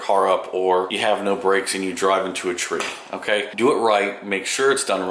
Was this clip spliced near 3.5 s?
yes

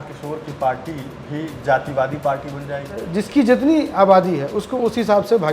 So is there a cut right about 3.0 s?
yes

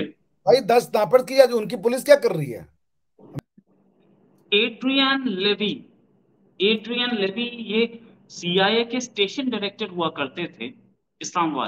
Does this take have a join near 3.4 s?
yes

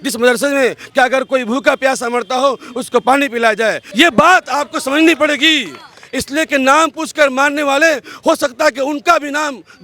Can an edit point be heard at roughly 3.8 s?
yes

